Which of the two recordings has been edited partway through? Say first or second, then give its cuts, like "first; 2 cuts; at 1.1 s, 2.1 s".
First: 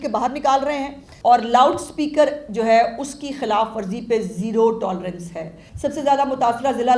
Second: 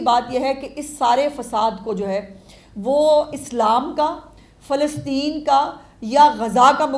first; 2 cuts; at 1.0 s, 5.6 s